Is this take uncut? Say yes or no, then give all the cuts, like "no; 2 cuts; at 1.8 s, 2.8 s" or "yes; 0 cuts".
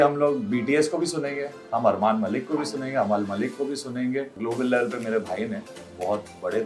no; 1 cut; at 4.4 s